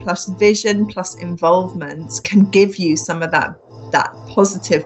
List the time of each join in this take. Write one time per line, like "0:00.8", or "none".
0:02.1